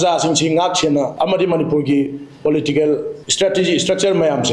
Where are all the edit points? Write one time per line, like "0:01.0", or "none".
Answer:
0:01.1
0:03.2